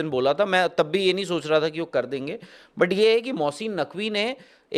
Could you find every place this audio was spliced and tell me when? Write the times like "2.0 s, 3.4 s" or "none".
none